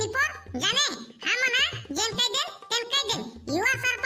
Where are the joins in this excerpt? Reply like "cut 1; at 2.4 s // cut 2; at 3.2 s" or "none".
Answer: none